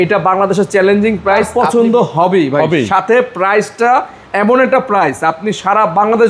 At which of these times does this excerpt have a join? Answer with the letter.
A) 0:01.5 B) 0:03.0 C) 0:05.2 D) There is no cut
A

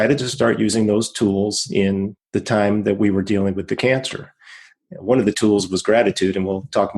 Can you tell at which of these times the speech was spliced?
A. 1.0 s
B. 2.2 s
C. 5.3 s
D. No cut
B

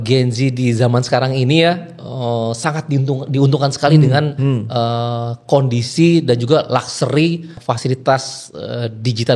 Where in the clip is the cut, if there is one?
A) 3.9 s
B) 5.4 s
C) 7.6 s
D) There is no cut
C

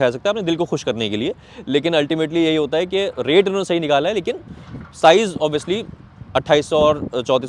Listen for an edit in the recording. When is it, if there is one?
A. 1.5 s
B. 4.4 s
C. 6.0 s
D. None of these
D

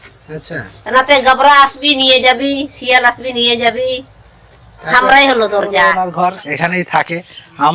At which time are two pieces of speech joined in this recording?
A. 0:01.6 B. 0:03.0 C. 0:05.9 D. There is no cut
C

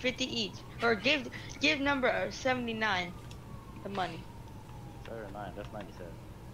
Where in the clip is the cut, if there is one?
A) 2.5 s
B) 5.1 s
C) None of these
C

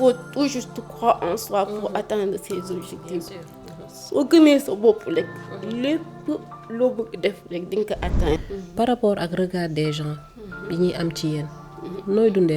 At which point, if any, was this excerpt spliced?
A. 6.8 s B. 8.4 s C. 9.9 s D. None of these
B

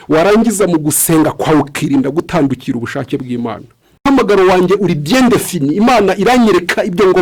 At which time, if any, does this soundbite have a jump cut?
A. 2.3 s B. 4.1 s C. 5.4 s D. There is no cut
B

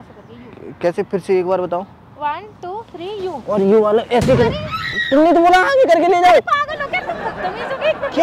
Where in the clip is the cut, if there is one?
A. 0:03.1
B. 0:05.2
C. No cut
C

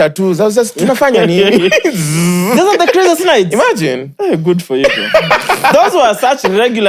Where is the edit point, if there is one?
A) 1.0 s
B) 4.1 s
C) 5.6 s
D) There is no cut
D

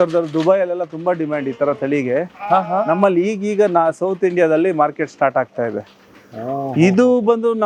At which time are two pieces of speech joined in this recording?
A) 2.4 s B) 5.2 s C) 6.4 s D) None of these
D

